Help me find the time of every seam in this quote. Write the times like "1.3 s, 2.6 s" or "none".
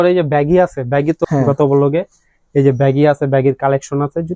1.2 s